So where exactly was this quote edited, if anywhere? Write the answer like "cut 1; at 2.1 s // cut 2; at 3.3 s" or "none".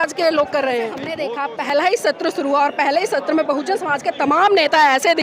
cut 1; at 1.0 s